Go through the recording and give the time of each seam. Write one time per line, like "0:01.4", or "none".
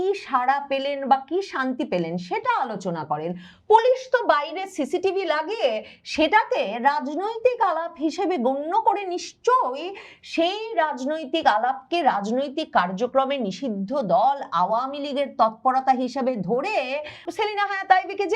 0:17.3